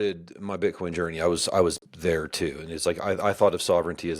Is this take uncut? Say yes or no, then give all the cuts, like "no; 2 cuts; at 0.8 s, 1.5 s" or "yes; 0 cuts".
yes; 0 cuts